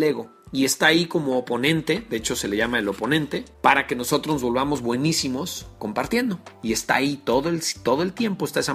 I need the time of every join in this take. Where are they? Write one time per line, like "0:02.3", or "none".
0:03.5
0:06.5